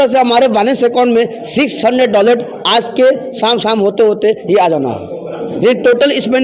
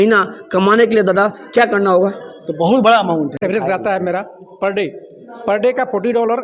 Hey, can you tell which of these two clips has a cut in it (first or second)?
second